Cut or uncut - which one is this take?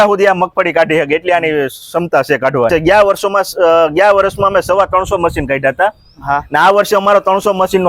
cut